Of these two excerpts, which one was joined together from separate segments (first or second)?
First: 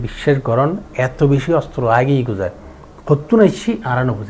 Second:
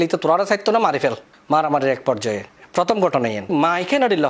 second